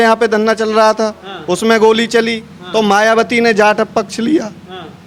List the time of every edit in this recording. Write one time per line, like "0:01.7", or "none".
none